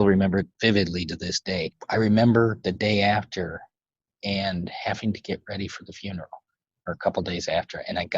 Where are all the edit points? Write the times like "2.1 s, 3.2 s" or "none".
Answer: 1.7 s